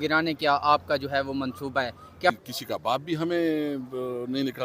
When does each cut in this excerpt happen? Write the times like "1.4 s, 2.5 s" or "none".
2.4 s

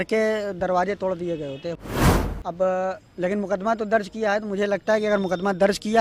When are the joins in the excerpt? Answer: 1.9 s

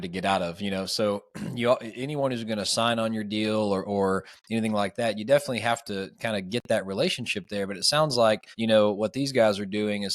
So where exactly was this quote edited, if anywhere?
8.5 s

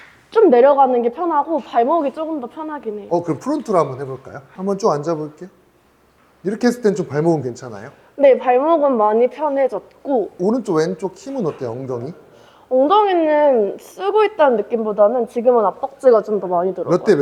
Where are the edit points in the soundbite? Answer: none

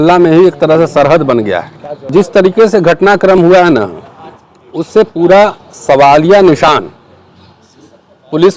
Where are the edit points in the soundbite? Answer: 2.0 s

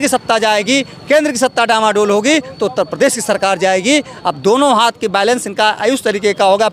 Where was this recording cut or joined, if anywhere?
none

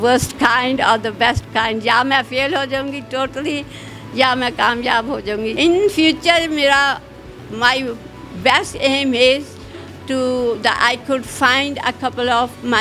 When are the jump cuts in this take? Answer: 5.5 s

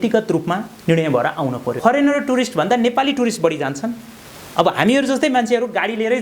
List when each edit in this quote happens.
1.8 s

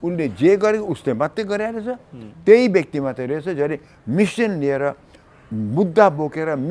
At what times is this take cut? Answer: none

